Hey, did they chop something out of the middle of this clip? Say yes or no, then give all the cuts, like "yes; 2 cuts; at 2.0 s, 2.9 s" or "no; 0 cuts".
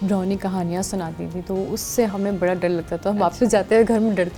no; 0 cuts